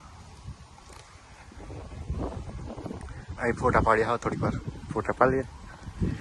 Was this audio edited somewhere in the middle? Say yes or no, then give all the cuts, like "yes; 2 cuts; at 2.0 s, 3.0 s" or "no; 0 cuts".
no; 0 cuts